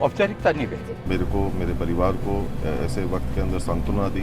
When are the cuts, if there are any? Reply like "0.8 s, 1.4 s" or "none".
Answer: 1.1 s